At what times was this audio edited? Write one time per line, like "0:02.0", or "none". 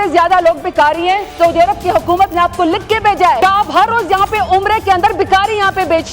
0:03.4